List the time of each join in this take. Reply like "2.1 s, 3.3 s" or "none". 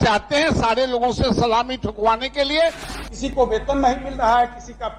2.9 s